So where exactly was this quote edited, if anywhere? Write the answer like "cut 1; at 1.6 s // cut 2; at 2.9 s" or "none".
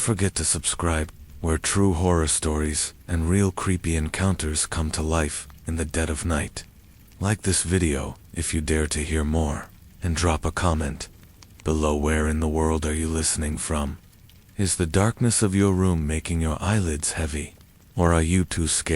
cut 1; at 1.1 s